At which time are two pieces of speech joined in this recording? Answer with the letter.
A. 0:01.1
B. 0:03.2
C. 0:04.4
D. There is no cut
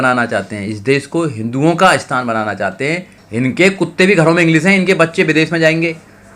B